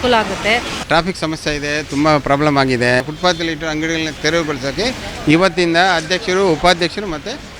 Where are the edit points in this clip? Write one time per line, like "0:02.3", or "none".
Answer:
0:00.8
0:03.0
0:04.1